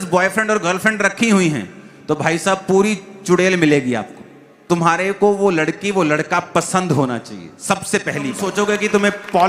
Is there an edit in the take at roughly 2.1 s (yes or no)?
no